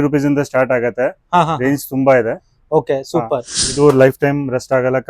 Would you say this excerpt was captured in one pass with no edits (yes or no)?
no